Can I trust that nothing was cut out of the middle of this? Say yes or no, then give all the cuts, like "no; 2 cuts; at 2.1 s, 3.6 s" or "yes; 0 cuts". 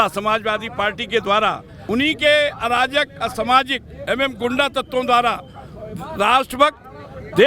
no; 1 cut; at 1.7 s